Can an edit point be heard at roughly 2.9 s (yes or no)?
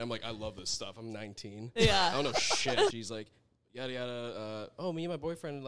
yes